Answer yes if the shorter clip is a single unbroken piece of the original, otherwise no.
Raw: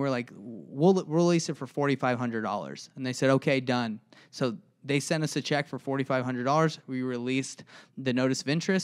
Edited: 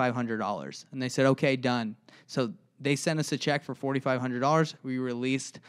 yes